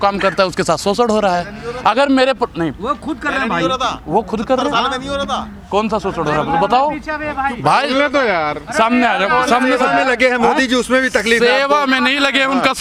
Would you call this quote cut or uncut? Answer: uncut